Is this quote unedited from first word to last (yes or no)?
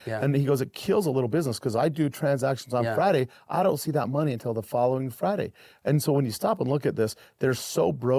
yes